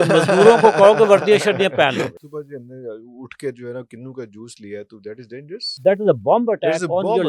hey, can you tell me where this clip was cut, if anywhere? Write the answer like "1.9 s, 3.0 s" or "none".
2.2 s, 5.7 s